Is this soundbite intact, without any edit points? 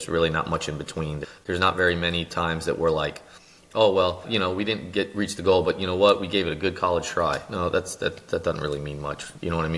no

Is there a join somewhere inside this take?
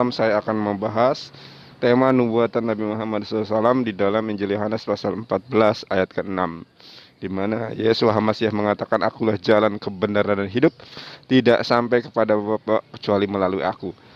no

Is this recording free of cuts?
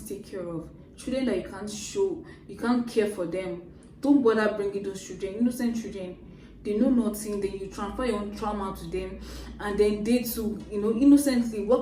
yes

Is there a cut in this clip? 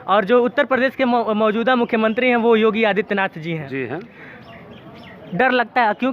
no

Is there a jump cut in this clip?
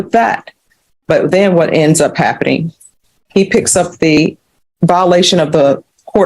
yes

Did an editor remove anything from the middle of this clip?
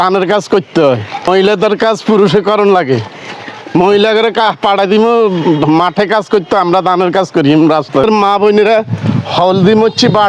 yes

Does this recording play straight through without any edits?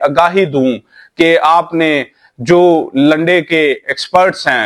yes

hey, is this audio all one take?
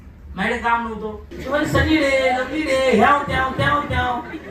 no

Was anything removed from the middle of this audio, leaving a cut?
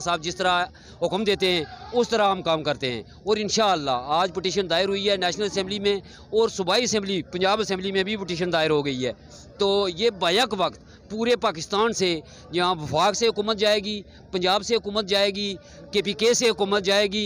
no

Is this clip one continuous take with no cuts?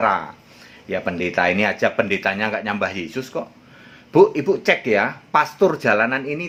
yes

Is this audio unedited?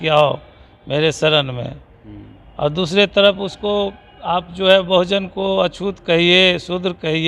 yes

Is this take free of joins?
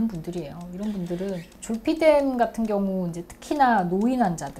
no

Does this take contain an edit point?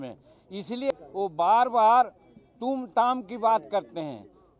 yes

